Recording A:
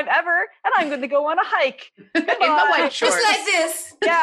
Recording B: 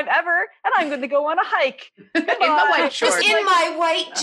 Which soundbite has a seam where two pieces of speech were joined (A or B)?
B